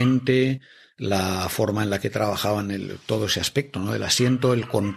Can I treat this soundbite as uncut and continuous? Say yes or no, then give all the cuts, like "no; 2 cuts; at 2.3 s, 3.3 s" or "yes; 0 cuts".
yes; 0 cuts